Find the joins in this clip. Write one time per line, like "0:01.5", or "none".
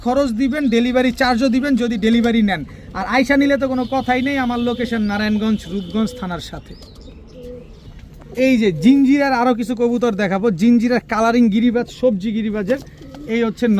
none